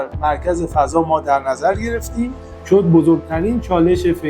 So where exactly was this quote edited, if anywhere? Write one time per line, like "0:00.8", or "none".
0:02.5

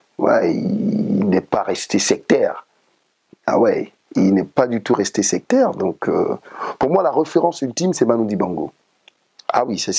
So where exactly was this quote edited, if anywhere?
none

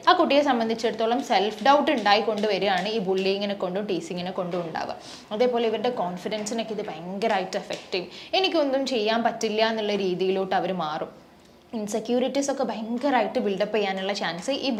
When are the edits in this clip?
none

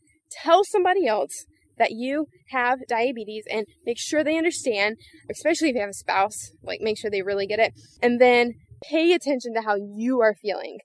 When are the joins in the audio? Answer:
none

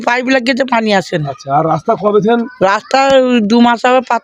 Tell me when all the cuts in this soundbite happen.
none

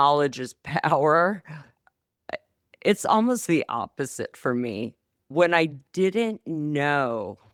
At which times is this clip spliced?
none

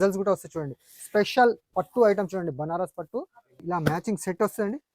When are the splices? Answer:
0:03.6

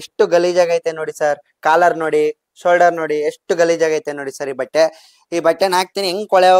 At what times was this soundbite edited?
none

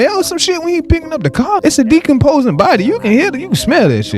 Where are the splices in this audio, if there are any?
0:01.6

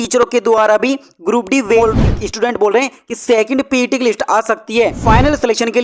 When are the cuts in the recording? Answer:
0:01.8
0:05.0

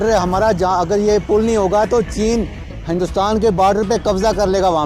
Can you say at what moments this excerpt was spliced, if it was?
none

